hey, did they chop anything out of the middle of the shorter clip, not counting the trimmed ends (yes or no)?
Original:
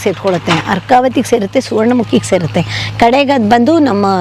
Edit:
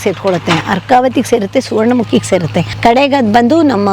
yes